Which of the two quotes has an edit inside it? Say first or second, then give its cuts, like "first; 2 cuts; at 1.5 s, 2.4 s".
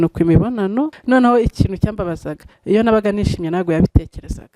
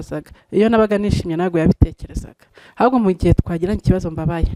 first; 1 cut; at 1.0 s